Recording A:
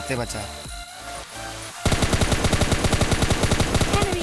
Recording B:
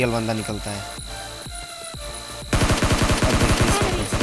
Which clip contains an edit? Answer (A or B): A